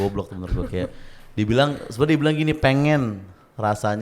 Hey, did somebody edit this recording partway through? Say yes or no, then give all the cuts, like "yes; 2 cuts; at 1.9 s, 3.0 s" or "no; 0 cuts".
no; 0 cuts